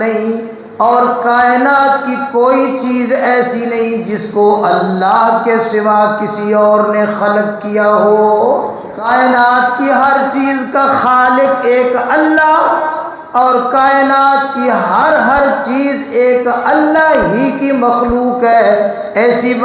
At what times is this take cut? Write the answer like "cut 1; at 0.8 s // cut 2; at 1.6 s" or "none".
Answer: cut 1; at 9.0 s

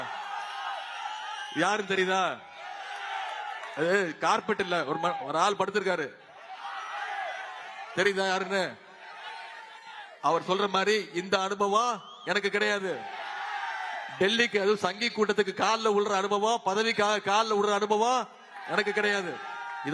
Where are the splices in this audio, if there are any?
none

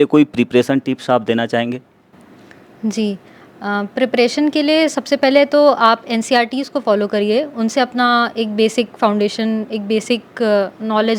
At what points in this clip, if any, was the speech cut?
none

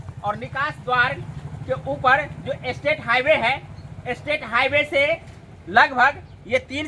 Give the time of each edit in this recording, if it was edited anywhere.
none

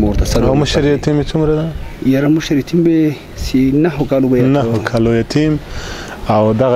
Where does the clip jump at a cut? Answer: none

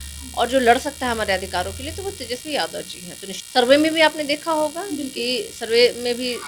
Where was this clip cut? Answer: cut 1; at 3.3 s

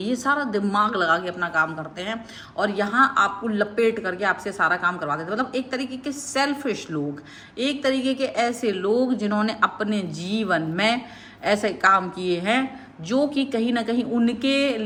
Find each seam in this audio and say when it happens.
none

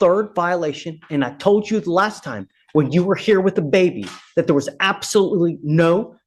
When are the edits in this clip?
none

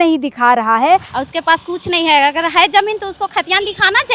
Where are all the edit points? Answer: cut 1; at 1.1 s

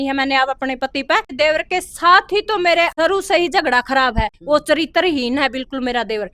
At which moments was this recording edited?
cut 1; at 1.3 s // cut 2; at 2.9 s

